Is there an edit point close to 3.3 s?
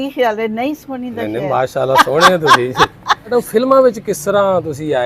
yes; 1 cut; at 3.3 s

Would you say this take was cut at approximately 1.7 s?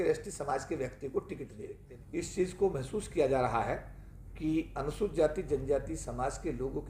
yes; 1 cut; at 1.7 s

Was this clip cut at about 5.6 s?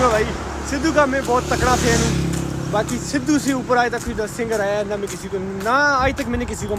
no; 0 cuts

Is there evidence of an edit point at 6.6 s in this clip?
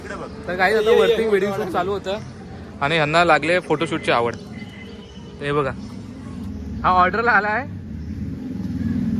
no; 0 cuts

